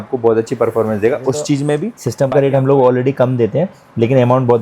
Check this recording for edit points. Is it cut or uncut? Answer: cut